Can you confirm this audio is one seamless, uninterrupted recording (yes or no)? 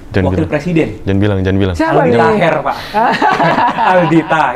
yes